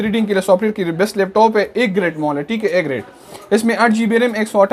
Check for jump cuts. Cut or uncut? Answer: uncut